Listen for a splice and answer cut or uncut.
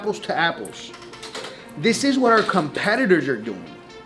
uncut